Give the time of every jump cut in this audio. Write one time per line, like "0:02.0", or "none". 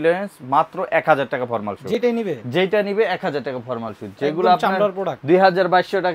none